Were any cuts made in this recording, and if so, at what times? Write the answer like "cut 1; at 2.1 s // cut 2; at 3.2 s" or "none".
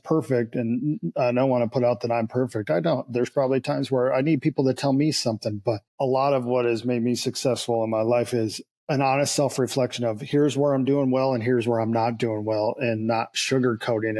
none